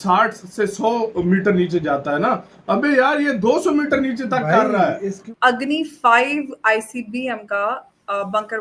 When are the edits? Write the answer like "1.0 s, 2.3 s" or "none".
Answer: 5.4 s